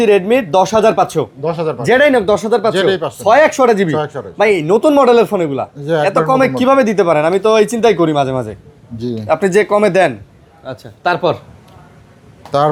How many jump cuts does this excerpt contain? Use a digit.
0